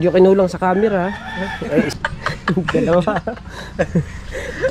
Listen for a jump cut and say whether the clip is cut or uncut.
cut